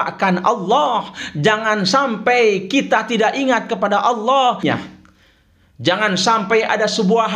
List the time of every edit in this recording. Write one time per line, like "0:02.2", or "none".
0:04.6